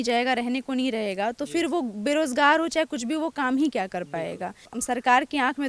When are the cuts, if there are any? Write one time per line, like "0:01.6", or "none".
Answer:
0:04.7